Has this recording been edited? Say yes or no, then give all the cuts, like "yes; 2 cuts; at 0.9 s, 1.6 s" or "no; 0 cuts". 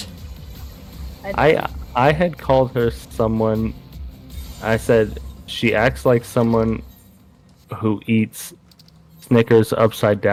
no; 0 cuts